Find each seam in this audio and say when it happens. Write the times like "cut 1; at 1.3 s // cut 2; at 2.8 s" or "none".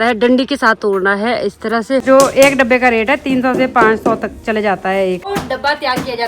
cut 1; at 2.0 s // cut 2; at 5.3 s